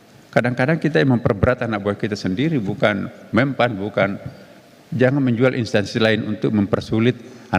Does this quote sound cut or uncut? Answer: uncut